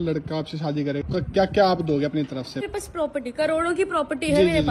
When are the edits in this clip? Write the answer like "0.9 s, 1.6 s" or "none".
1.0 s, 2.6 s